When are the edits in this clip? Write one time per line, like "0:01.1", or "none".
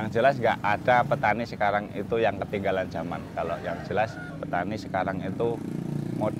0:04.3